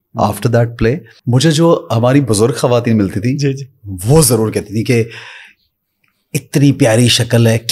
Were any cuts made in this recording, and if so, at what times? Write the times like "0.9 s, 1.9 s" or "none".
1.1 s